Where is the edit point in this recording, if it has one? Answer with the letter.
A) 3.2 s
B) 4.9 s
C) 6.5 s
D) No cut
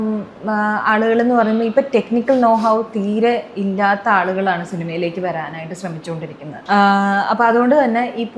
C